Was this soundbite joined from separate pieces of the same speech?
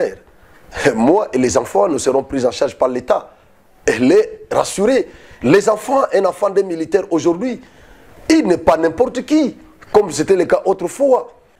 no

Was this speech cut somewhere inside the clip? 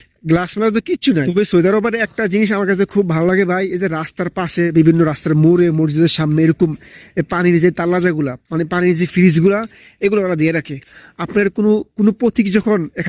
yes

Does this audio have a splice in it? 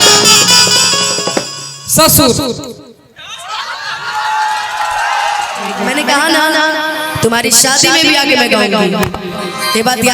yes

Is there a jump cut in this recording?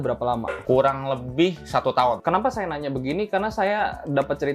no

